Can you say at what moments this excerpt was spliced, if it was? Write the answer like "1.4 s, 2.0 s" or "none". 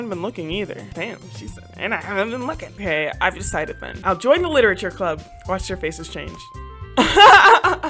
0.9 s, 2.8 s, 3.9 s

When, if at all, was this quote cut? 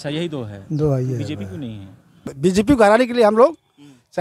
2.2 s

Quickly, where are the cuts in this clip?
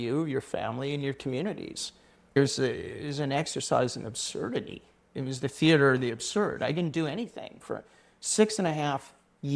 2.3 s

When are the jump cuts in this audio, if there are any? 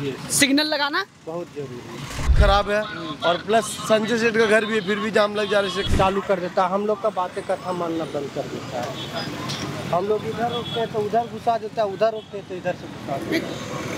2.3 s, 5.8 s

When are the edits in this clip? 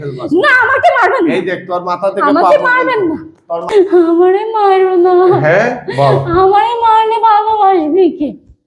3.7 s

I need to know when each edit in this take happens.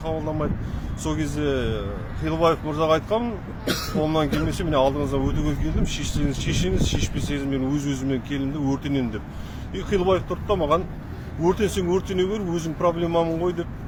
none

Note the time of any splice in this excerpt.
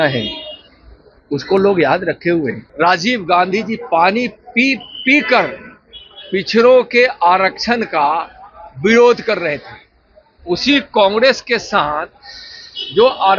2.6 s

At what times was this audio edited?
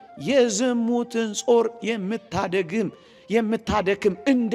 none

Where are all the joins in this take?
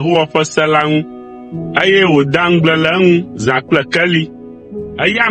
none

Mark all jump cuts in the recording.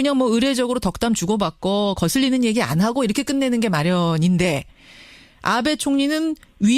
3.0 s

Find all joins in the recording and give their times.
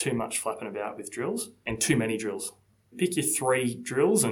1.6 s, 2.9 s

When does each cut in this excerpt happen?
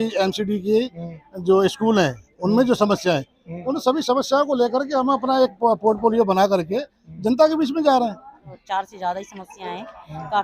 8.5 s

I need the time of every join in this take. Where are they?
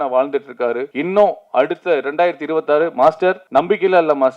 0.9 s, 3.4 s

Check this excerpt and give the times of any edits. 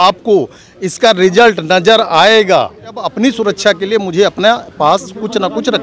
3.1 s

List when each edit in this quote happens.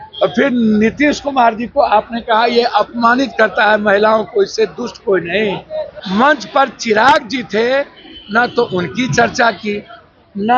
5.9 s

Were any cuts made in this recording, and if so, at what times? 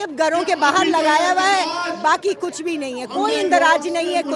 none

